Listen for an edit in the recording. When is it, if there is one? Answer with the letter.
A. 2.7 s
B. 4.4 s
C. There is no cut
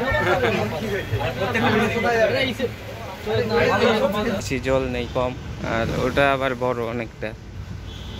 B